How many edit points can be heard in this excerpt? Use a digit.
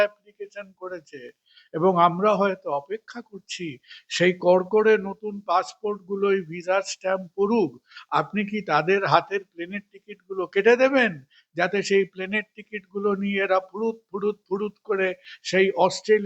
0